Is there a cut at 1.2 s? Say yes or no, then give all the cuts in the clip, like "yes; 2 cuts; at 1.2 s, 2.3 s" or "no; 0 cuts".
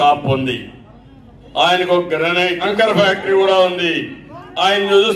no; 1 cut; at 2.6 s